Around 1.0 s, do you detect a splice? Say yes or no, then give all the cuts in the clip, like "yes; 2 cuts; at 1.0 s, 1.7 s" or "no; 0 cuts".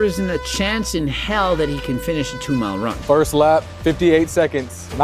no; 1 cut; at 3.0 s